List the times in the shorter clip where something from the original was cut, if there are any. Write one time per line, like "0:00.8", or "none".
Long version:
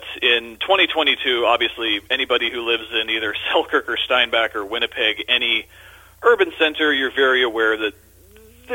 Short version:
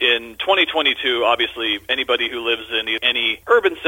0:02.9

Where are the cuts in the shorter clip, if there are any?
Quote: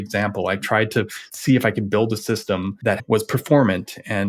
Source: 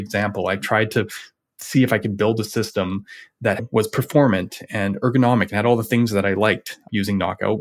0:01.2
0:03.0

